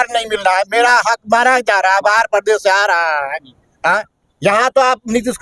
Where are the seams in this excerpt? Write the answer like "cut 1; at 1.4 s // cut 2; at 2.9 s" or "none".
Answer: none